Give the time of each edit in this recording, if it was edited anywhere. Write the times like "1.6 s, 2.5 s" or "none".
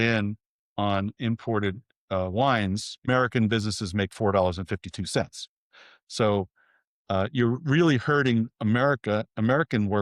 3.1 s